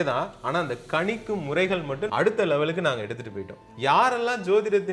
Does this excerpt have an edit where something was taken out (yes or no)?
yes